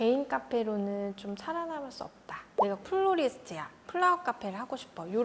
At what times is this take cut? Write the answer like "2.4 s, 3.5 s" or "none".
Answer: 2.5 s